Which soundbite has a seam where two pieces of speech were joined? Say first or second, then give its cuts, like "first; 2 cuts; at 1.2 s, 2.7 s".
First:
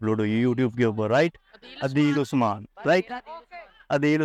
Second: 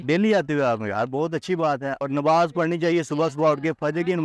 second; 1 cut; at 2.0 s